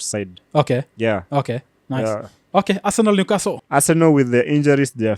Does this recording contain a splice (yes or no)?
yes